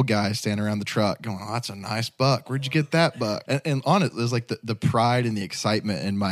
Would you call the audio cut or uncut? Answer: cut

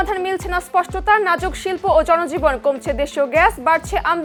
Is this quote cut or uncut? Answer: uncut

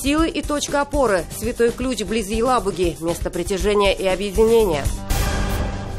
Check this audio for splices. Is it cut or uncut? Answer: cut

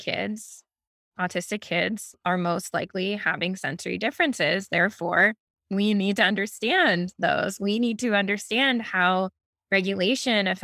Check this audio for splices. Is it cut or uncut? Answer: cut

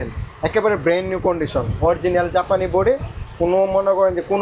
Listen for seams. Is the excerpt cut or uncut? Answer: uncut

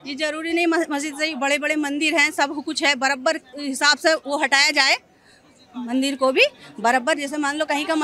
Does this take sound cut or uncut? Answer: uncut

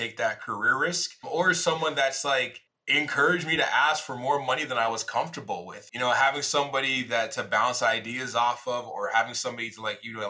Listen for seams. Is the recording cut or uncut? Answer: uncut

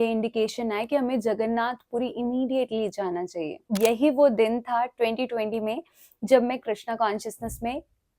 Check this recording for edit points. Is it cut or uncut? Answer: cut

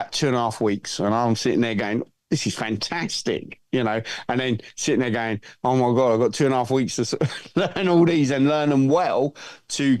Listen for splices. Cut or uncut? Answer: uncut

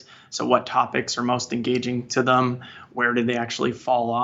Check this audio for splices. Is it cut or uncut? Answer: uncut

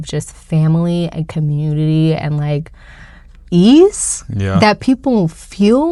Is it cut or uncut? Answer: uncut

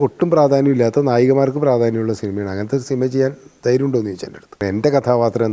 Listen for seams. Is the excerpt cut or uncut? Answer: cut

